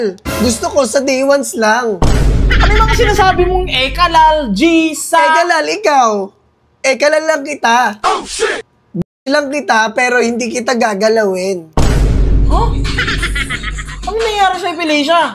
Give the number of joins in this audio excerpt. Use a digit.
0